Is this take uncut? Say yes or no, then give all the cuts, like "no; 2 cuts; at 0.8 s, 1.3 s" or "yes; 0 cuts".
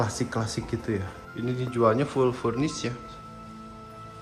no; 1 cut; at 1.2 s